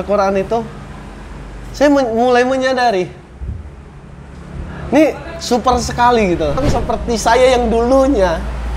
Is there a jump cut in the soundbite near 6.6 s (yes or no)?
yes